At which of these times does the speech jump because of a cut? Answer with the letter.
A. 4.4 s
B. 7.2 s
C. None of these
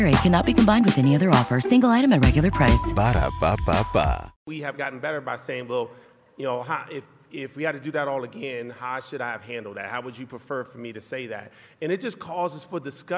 A